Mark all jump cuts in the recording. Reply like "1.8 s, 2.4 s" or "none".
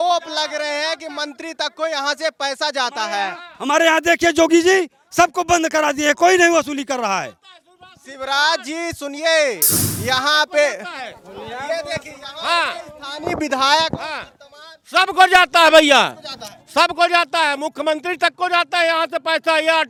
none